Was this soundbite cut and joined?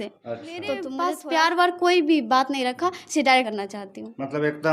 yes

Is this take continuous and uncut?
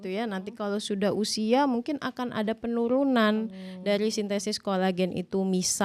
yes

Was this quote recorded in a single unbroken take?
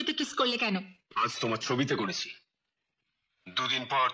no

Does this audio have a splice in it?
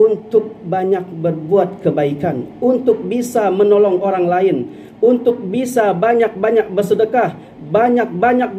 no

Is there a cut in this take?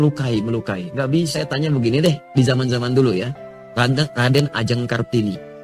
yes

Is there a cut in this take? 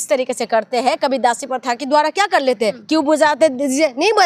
yes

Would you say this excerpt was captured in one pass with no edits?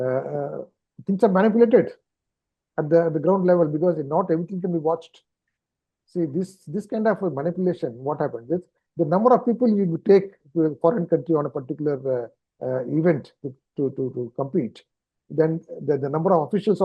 yes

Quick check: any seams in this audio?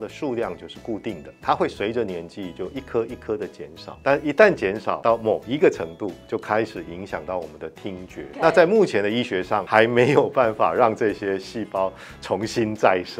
yes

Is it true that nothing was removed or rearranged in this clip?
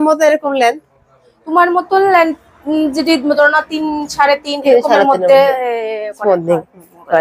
yes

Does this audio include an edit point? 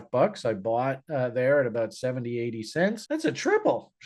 no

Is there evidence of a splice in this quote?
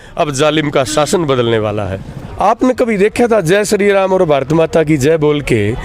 yes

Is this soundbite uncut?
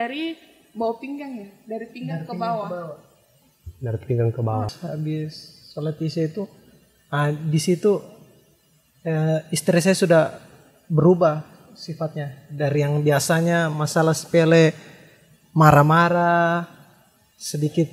no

